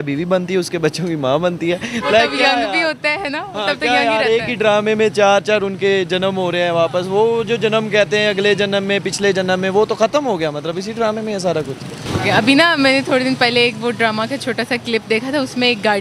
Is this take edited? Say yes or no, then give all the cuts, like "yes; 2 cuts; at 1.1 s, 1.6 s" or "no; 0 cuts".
no; 0 cuts